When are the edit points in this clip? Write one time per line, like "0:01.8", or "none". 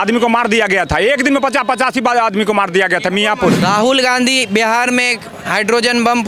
0:03.6

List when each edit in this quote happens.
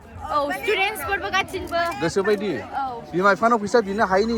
none

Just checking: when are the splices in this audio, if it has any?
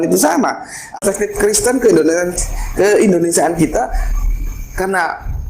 0:01.0

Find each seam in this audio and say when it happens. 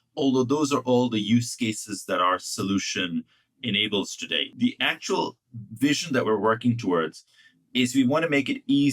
0:04.5

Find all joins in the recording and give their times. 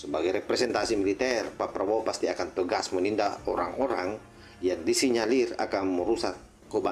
none

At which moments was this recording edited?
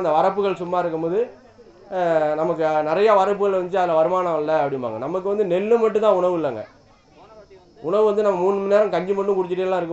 none

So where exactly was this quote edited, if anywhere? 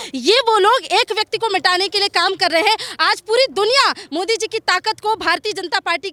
none

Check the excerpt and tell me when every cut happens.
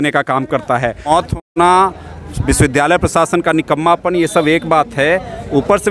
0:01.4

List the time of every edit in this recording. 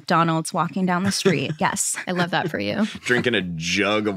none

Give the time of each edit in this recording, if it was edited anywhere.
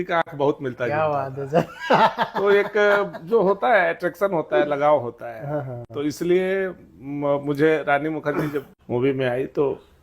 0:08.8

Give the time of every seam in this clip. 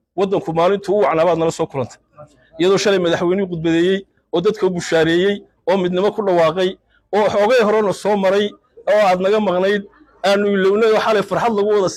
none

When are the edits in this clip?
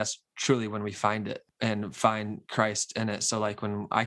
0:01.5

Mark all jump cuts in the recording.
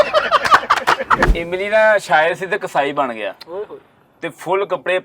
0:01.3

